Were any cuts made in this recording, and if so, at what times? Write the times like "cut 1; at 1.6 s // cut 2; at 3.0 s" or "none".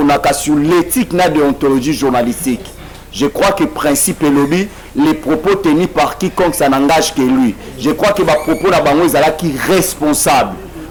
none